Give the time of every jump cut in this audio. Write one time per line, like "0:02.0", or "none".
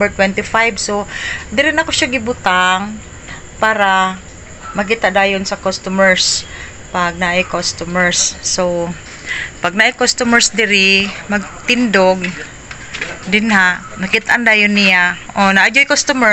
none